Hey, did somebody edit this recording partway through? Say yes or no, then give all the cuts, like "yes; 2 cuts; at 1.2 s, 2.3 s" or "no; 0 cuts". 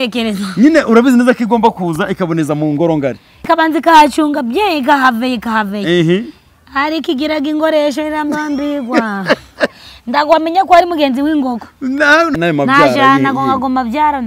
yes; 2 cuts; at 3.3 s, 12.3 s